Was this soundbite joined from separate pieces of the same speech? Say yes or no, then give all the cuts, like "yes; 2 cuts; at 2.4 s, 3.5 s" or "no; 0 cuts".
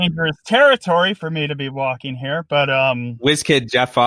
yes; 1 cut; at 3.1 s